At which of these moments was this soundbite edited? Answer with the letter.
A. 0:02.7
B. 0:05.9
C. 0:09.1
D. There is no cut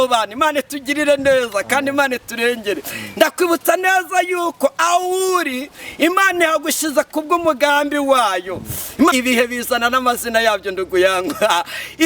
C